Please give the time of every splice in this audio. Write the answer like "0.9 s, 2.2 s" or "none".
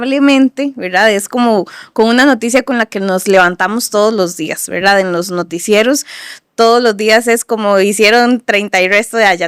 none